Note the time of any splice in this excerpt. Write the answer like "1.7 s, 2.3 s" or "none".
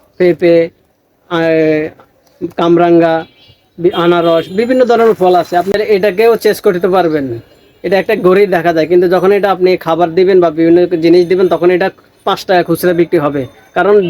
5.7 s